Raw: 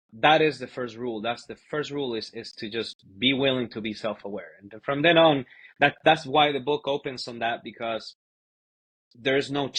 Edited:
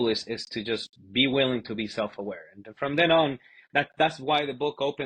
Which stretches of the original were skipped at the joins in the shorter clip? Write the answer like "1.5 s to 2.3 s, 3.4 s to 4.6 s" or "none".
none